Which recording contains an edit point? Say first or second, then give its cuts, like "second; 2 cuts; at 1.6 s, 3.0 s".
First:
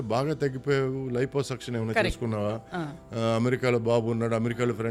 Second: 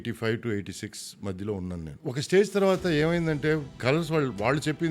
second; 2 cuts; at 1.9 s, 3.8 s